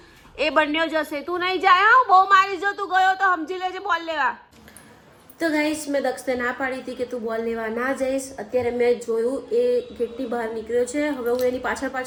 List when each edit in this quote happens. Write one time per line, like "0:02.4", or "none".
none